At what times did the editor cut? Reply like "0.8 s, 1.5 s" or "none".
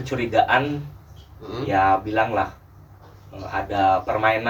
none